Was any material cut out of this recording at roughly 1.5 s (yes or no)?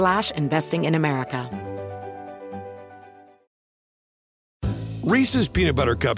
yes